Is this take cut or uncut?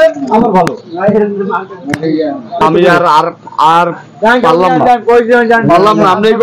uncut